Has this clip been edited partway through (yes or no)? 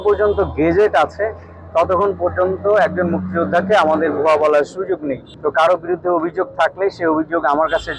no